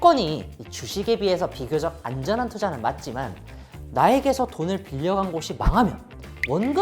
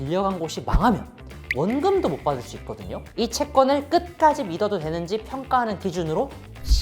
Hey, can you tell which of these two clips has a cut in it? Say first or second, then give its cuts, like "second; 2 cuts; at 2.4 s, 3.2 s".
second; 1 cut; at 3.0 s